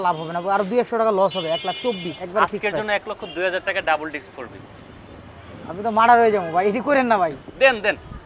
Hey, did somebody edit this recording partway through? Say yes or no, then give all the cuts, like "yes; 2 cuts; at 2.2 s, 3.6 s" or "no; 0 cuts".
yes; 1 cut; at 2.2 s